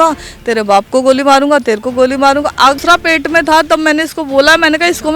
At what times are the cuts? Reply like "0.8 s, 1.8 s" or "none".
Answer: 2.8 s